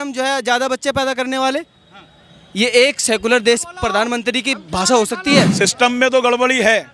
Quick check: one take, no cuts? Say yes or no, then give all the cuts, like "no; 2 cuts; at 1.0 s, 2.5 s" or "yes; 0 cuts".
no; 1 cut; at 5.5 s